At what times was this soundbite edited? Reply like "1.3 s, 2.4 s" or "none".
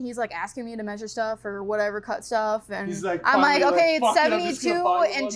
none